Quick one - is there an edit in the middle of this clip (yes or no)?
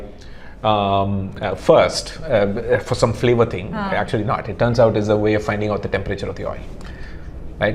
no